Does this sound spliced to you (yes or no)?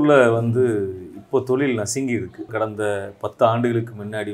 yes